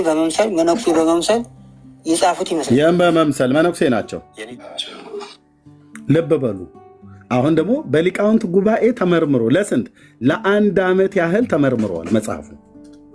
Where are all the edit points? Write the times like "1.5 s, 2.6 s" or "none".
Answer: 4.4 s